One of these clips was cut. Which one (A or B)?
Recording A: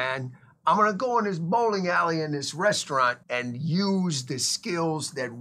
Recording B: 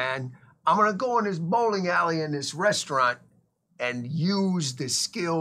A